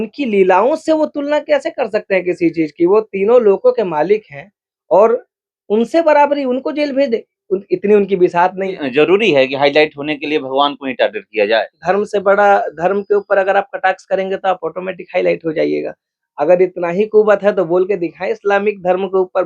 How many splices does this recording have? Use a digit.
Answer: 1